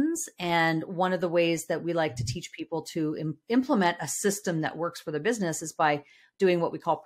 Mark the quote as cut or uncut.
uncut